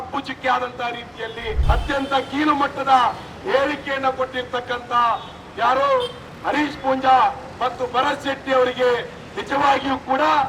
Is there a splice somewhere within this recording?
yes; 1 cut; at 1.5 s

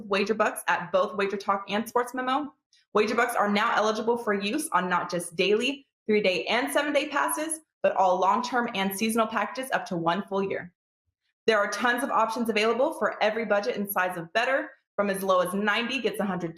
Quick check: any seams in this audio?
yes; 1 cut; at 4.6 s

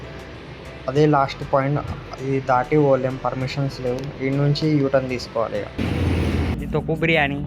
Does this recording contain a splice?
yes; 1 cut; at 6.5 s

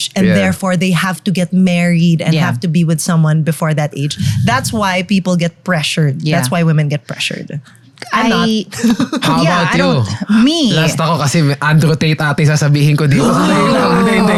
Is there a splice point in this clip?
no; 0 cuts

